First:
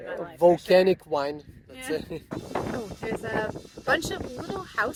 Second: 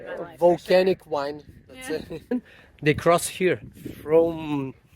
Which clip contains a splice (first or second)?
second